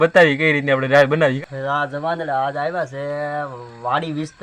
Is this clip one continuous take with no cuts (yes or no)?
no